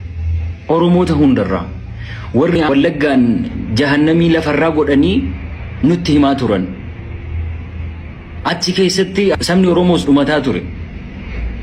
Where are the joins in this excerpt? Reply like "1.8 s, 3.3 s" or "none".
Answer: 2.6 s, 9.4 s